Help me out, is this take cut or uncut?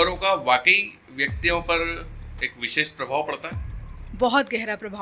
uncut